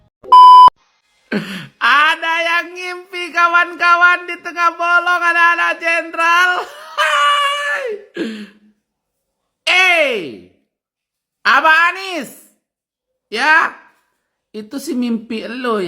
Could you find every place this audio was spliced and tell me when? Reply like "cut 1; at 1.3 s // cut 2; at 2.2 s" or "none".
cut 1; at 0.9 s

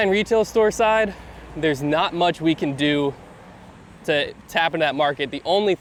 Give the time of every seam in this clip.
none

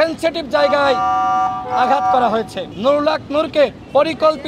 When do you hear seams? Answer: cut 1; at 2.7 s

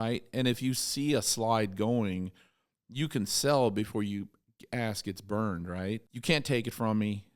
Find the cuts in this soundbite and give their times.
cut 1; at 6.1 s

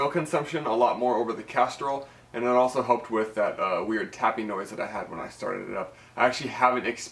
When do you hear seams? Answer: none

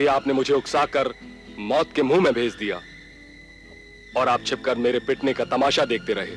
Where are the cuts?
none

